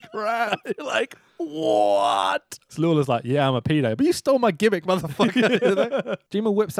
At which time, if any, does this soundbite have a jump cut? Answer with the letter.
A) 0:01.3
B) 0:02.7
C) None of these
B